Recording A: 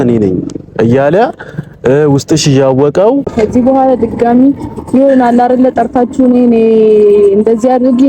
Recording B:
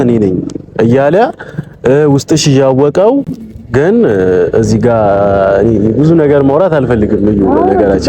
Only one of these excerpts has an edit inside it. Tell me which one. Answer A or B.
A